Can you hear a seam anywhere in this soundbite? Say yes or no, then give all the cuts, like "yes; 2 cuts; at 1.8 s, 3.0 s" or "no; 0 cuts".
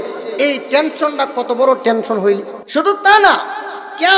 yes; 1 cut; at 2.5 s